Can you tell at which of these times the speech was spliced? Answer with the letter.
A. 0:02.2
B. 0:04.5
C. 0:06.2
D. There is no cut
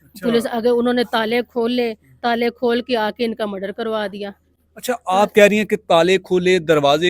D